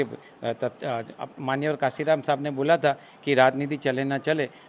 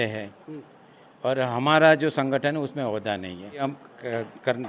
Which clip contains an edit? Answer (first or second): second